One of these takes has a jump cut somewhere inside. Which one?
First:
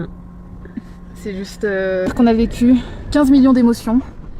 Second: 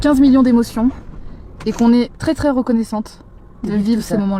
first; 1 cut; at 2.1 s

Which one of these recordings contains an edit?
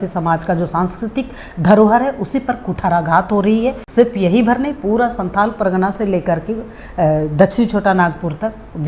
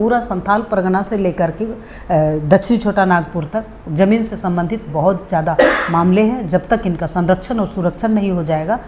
first; 1 cut; at 3.8 s

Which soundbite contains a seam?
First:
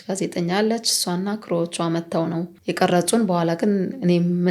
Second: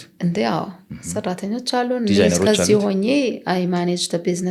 first; 1 cut; at 2.5 s

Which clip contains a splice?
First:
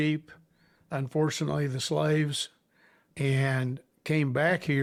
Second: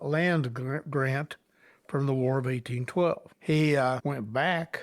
second; 2 cuts; at 3.3 s, 4.0 s

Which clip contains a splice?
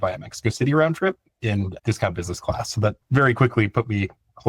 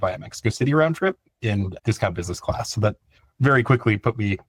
first; 1 cut; at 3.0 s

